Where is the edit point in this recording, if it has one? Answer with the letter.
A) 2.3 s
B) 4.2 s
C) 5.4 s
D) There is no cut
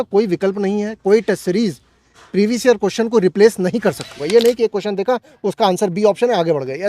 B